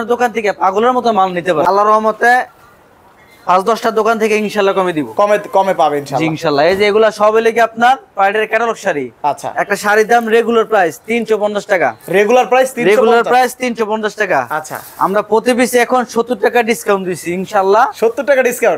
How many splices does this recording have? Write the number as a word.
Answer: one